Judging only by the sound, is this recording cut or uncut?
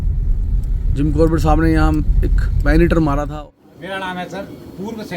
cut